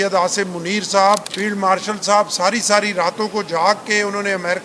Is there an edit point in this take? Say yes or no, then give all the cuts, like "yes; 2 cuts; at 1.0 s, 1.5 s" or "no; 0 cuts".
yes; 1 cut; at 1.3 s